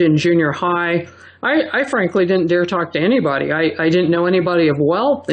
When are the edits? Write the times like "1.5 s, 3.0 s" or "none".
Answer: none